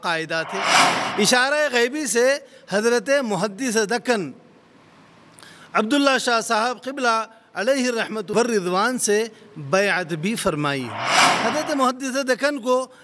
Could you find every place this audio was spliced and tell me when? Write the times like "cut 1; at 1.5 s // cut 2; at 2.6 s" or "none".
cut 1; at 11.2 s